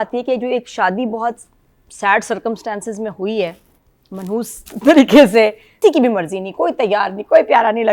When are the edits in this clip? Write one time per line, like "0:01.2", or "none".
0:05.8